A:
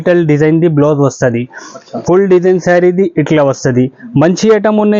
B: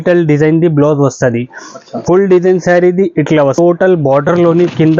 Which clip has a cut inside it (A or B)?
B